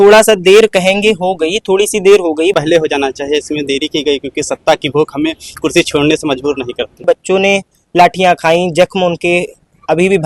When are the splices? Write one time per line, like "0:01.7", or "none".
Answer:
0:02.5
0:07.0